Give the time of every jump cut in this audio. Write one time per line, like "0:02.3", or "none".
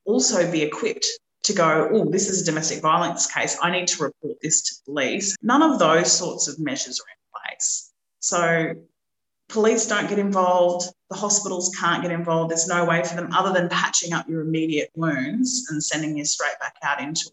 0:05.3